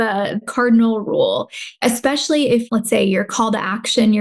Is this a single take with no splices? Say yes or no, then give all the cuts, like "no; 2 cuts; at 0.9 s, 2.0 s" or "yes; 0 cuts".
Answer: no; 1 cut; at 2.6 s